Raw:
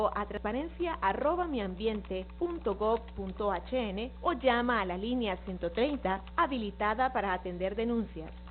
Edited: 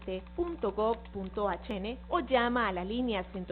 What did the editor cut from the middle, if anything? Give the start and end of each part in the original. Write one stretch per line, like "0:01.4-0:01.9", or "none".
0:03.7-0:03.8